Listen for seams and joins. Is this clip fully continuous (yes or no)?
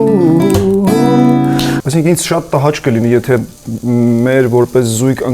no